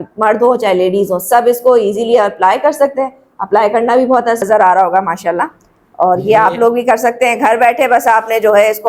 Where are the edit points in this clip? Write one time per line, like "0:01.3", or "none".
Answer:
0:04.4

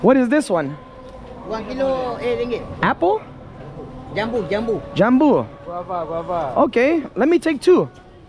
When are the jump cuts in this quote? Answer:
none

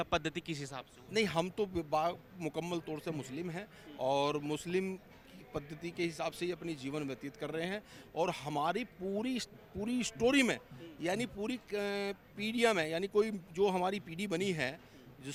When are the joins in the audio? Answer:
none

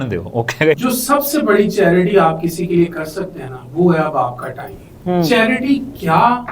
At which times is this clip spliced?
0:00.8
0:05.3

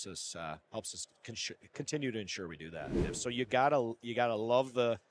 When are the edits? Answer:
0:03.1

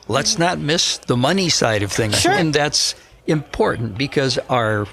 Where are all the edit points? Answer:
0:00.9
0:02.4

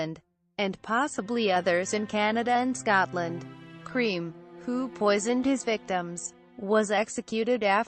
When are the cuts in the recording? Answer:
none

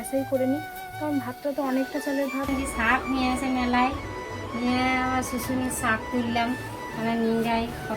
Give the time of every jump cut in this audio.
0:02.5

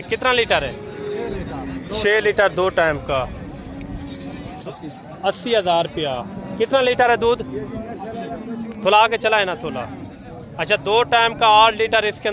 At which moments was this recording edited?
0:04.5

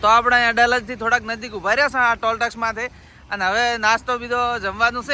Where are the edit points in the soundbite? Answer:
none

